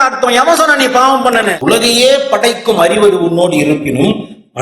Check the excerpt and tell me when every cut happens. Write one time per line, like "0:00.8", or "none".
0:01.5